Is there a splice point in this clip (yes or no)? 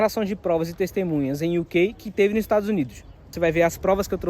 yes